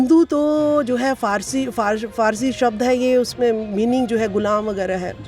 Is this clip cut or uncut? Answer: uncut